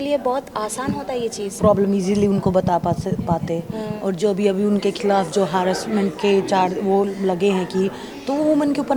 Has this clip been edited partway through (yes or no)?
yes